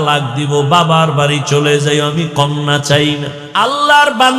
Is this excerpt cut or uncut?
cut